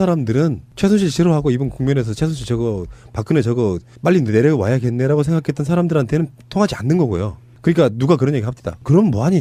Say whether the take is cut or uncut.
uncut